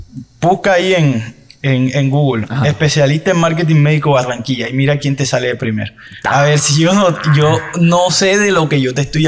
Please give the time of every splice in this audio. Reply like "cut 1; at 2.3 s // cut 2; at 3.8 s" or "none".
none

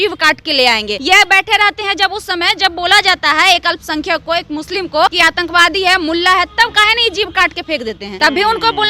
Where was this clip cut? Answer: cut 1; at 0.9 s // cut 2; at 5.1 s // cut 3; at 8.1 s

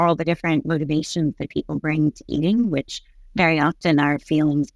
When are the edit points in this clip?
none

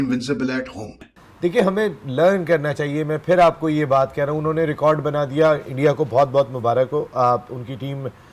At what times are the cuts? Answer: cut 1; at 1.1 s

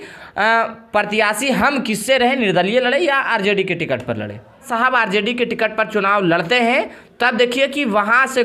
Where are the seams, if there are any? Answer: cut 1; at 4.7 s

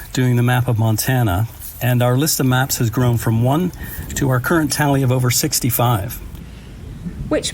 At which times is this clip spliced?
cut 1; at 6.5 s

